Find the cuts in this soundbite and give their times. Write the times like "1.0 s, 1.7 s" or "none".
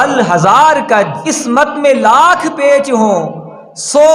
1.3 s